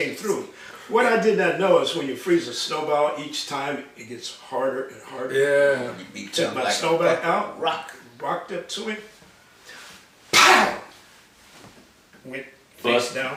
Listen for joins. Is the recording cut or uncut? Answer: uncut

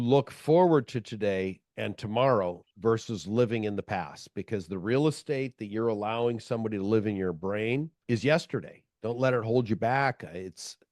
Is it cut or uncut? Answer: uncut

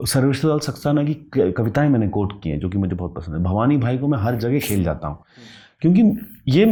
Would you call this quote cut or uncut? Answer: uncut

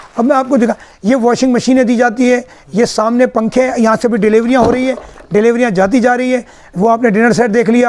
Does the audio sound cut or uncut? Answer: uncut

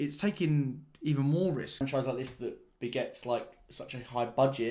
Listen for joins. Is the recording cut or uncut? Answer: cut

